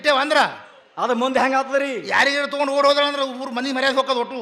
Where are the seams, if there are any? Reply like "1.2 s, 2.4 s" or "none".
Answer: none